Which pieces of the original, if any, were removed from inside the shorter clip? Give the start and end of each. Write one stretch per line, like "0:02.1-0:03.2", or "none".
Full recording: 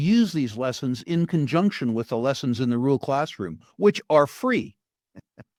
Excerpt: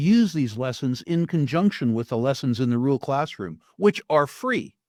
none